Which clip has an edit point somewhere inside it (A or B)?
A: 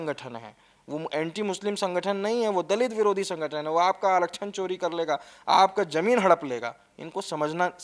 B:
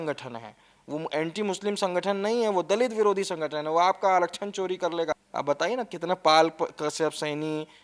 B